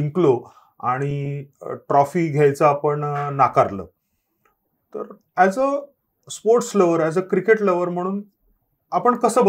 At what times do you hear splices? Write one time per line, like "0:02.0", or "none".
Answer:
none